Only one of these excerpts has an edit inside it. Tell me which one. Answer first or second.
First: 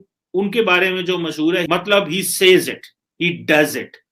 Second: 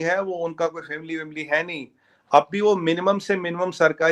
first